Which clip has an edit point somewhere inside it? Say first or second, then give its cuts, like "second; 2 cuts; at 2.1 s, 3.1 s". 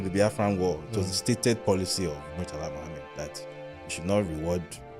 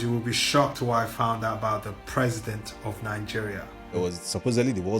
second; 1 cut; at 3.9 s